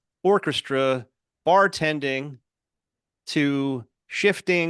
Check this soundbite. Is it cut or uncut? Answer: uncut